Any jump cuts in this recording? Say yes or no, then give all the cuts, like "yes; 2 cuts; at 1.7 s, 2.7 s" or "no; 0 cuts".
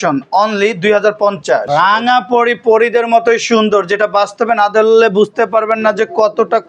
yes; 1 cut; at 1.7 s